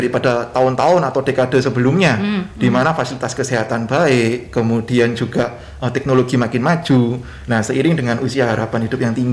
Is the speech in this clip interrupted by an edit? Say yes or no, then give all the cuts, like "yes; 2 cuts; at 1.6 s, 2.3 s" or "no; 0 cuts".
no; 0 cuts